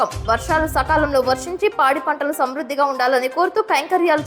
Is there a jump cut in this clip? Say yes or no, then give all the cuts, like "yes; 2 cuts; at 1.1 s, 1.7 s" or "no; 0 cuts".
no; 0 cuts